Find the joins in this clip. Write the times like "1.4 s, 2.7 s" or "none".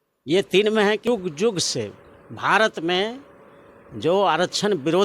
1.0 s